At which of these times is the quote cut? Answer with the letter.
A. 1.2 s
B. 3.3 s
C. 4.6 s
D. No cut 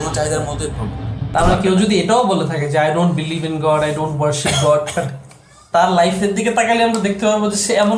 A